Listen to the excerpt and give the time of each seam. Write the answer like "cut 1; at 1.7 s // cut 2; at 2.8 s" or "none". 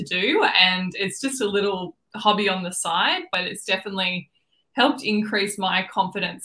cut 1; at 3.3 s